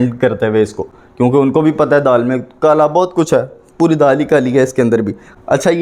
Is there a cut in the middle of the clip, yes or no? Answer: no